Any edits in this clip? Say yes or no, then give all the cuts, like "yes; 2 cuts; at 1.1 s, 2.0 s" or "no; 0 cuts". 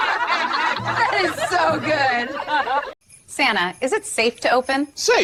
no; 0 cuts